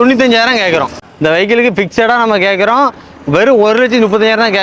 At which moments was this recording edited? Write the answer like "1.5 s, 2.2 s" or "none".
1.0 s